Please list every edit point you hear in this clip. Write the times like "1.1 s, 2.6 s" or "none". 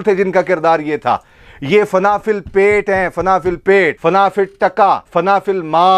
4.0 s, 5.1 s